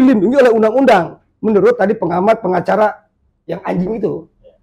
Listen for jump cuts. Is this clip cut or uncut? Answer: uncut